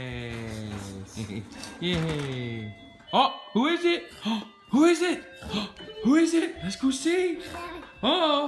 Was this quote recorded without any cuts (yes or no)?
yes